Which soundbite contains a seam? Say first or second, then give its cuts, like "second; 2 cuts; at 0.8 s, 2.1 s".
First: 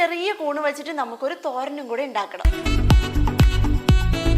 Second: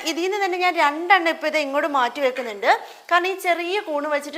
first; 1 cut; at 2.5 s